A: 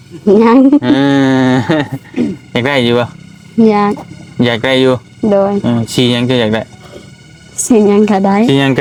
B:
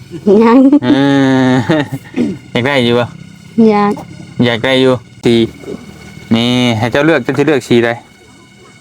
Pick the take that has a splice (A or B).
B